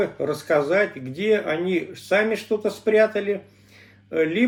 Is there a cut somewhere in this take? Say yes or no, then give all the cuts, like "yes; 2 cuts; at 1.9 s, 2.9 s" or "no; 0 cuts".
no; 0 cuts